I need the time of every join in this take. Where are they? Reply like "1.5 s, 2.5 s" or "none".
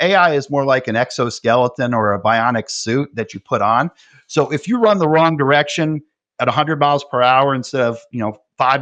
none